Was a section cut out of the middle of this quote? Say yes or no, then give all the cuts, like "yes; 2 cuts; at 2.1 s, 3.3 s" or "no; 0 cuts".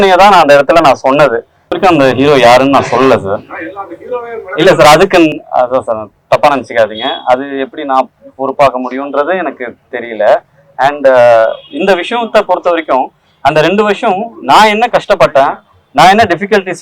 yes; 1 cut; at 1.7 s